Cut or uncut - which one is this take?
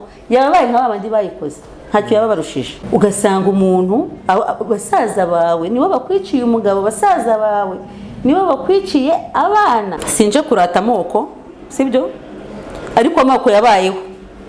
cut